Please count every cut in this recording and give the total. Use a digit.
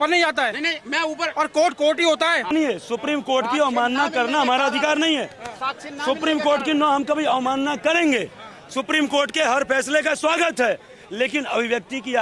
1